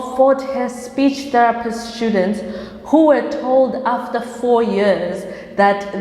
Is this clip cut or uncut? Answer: uncut